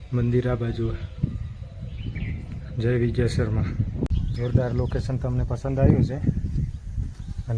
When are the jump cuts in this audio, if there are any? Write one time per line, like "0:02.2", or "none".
0:04.1